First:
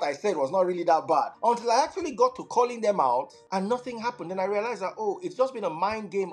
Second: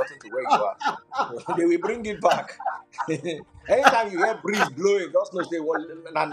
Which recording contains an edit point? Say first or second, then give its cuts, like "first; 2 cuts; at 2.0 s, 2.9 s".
first; 2 cuts; at 1.3 s, 3.4 s